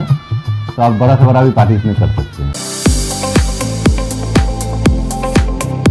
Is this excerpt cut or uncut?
cut